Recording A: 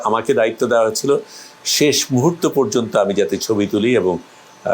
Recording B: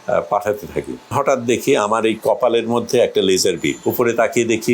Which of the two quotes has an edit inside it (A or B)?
B